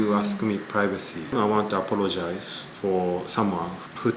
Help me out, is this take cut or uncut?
cut